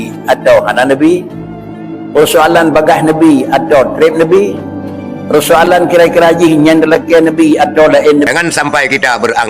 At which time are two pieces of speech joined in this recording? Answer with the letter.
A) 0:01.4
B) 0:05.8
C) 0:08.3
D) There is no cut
C